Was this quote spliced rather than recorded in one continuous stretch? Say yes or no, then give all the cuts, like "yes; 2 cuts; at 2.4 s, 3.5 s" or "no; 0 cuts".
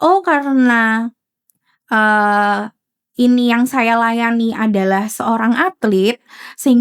no; 0 cuts